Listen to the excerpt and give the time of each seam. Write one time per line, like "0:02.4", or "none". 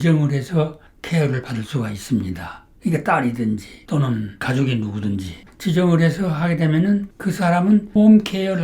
0:05.4
0:07.1